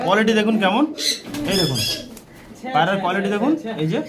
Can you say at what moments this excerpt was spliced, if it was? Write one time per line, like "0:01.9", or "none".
none